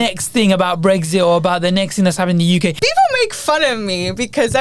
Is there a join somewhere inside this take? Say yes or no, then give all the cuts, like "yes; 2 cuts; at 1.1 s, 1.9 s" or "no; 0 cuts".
yes; 1 cut; at 2.8 s